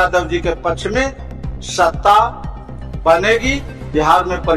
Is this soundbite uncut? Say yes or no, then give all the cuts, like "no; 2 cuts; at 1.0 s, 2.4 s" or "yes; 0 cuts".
yes; 0 cuts